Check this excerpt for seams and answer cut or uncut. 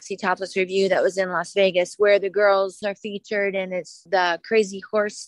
cut